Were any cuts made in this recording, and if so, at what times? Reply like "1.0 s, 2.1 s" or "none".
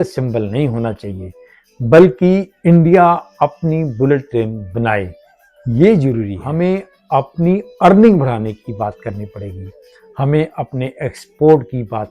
6.4 s